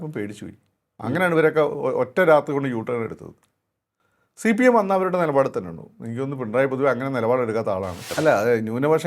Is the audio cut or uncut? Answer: cut